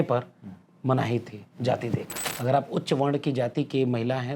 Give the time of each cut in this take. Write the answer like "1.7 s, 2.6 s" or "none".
2.2 s